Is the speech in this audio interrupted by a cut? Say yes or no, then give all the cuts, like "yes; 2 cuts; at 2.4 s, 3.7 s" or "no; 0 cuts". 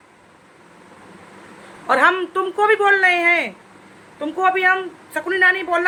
no; 0 cuts